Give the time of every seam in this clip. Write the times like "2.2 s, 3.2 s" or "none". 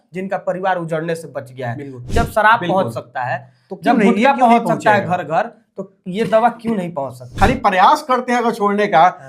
2.0 s, 7.3 s